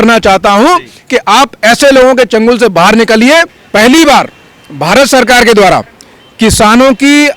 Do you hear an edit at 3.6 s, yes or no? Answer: yes